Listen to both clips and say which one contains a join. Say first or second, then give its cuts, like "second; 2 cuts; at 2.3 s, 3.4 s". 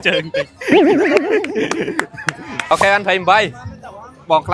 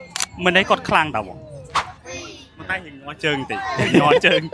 first; 1 cut; at 2.7 s